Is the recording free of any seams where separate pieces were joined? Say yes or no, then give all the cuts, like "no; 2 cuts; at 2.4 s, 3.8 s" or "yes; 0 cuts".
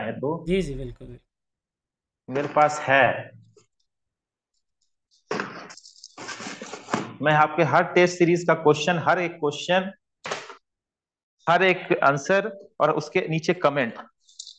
yes; 0 cuts